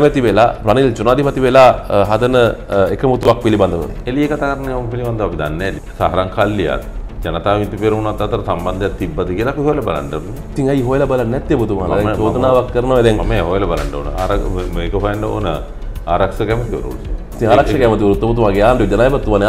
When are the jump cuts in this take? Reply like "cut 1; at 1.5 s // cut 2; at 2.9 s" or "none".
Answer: cut 1; at 3.9 s // cut 2; at 5.8 s